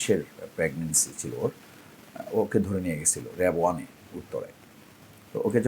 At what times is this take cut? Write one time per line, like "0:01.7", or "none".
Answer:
none